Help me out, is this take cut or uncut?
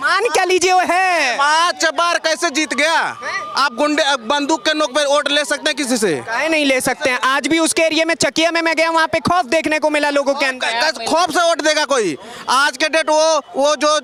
uncut